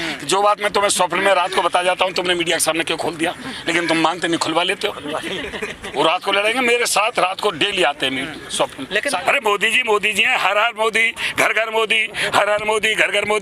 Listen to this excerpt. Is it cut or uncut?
cut